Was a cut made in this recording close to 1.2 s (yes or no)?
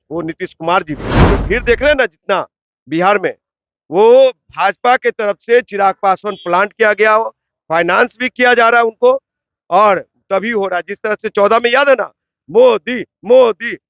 yes